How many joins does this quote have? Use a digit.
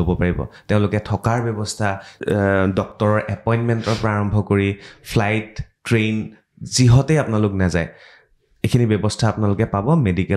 1